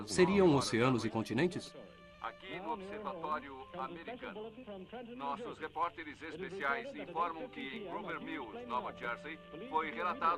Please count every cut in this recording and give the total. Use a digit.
0